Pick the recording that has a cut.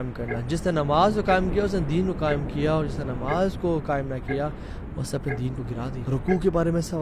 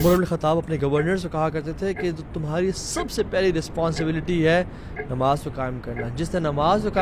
first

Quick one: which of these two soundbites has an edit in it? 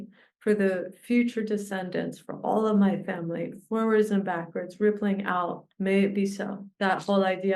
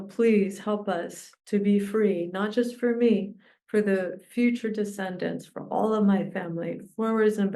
first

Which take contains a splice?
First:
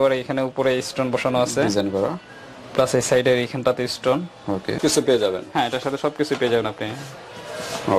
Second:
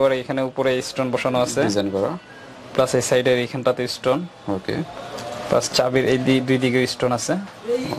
first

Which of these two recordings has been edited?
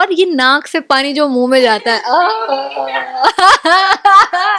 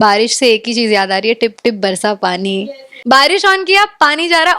second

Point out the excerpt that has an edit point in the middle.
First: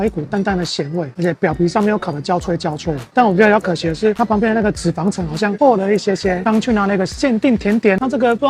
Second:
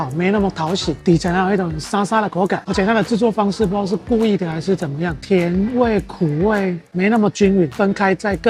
first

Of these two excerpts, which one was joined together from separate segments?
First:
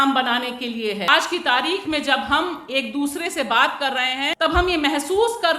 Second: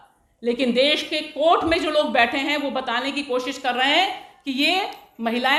first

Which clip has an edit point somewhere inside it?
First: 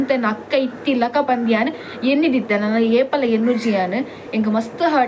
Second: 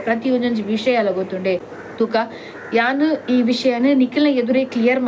second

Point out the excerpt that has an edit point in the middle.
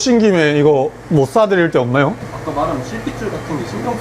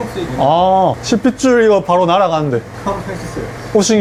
first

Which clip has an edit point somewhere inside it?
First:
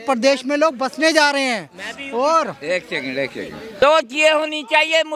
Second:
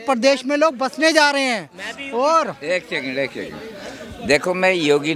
first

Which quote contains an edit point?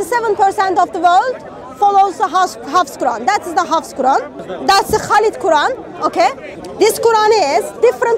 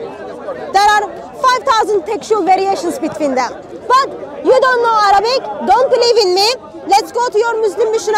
first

